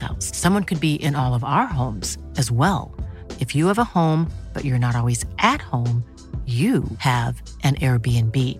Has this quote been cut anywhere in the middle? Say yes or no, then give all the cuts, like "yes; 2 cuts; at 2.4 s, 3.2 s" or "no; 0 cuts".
no; 0 cuts